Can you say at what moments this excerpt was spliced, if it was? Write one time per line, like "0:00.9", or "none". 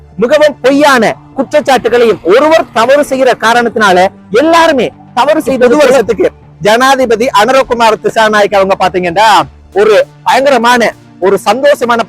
0:05.8